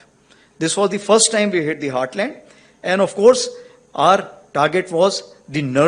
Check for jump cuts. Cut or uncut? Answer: uncut